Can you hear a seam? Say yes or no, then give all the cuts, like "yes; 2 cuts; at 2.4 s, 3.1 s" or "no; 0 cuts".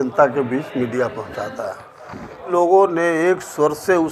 yes; 1 cut; at 2.5 s